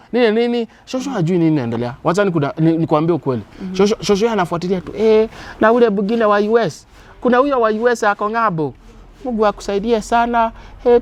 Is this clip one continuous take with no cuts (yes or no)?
yes